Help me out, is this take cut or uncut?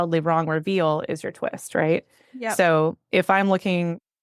uncut